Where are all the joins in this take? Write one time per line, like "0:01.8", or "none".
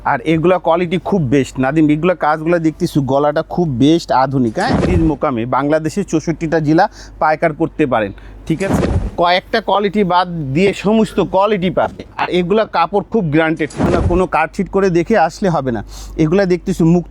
0:04.8
0:08.7
0:14.0

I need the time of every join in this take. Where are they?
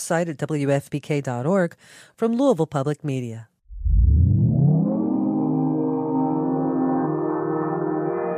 0:03.5

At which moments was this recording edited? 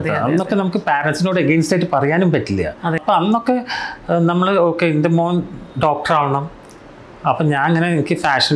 0:03.0

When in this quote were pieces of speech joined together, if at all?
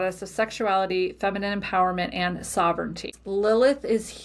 0:03.2

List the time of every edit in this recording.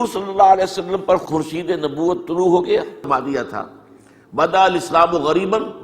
0:03.1

